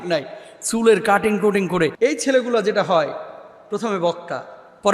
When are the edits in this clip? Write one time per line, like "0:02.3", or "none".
0:01.9